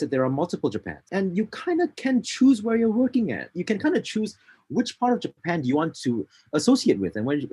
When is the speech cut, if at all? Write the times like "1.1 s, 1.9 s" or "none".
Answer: 1.0 s, 3.5 s